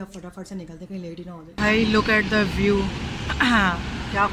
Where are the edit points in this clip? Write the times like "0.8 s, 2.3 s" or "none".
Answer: 1.5 s